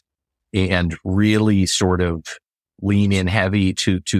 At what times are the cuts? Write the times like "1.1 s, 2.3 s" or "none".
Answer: none